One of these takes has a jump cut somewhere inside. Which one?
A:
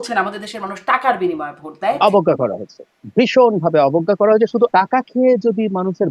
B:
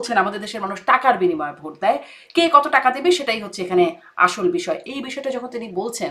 A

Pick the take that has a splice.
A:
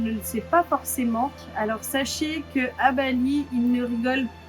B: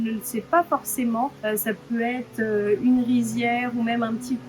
A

